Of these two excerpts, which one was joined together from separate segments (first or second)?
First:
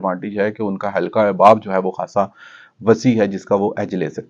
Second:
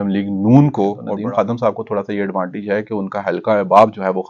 second